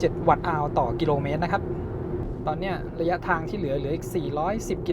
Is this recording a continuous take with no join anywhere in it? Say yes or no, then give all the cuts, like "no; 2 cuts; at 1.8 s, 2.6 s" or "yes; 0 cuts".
yes; 0 cuts